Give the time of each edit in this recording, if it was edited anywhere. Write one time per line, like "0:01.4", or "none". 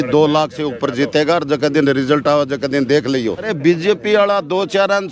0:03.5